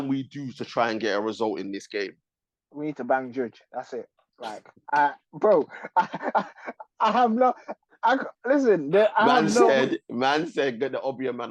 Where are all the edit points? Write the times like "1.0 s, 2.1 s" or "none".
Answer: none

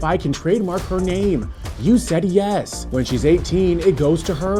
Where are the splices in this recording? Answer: none

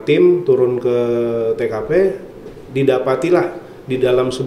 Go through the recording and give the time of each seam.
none

